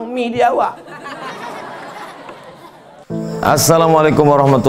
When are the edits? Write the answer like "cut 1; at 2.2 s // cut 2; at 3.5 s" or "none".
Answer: cut 1; at 3.0 s